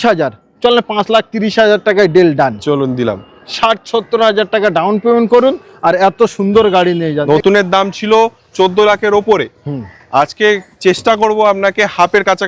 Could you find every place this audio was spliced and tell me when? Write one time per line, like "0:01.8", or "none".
0:07.2